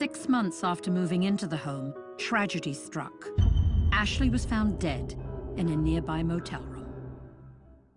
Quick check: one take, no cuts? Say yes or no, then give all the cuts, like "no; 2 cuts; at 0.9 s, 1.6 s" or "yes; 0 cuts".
no; 1 cut; at 6.5 s